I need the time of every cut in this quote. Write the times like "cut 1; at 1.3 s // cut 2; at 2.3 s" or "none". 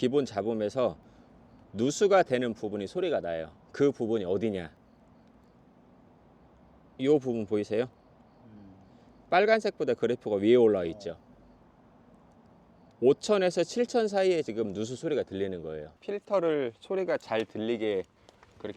cut 1; at 15.9 s